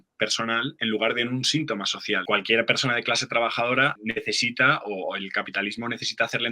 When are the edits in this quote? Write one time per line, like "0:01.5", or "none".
0:02.2